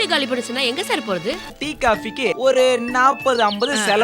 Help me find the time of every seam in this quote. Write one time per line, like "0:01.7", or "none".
0:01.5